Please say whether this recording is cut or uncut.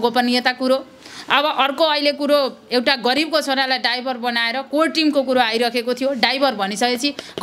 uncut